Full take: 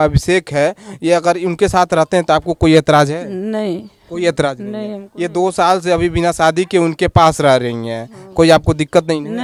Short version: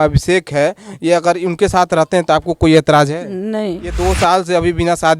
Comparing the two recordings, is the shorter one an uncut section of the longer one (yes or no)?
no